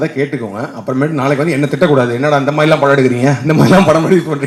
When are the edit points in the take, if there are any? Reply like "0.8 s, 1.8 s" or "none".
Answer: none

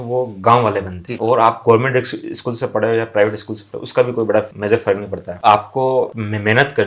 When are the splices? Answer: 1.0 s, 5.3 s

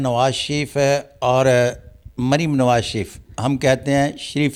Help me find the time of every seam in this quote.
none

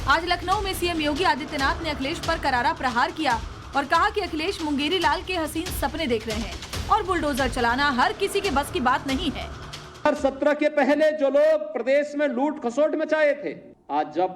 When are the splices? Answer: 2.0 s

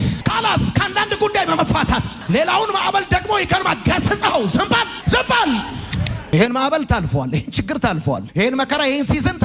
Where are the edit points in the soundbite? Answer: 6.2 s

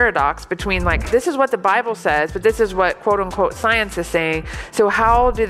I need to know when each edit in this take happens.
1.0 s

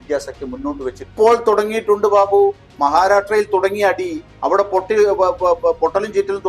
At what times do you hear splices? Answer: 1.0 s

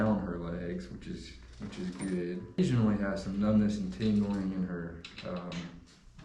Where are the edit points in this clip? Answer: 2.6 s

